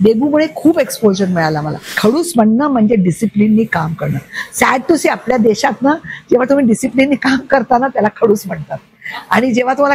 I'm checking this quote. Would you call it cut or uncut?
cut